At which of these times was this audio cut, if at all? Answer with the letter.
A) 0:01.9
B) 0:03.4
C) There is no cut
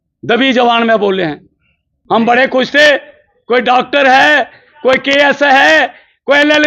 A